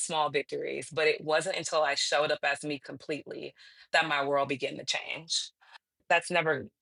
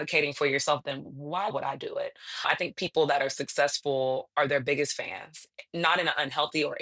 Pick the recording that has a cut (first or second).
second